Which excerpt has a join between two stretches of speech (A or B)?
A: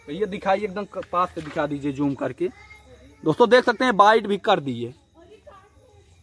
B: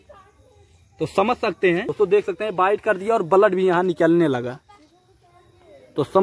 B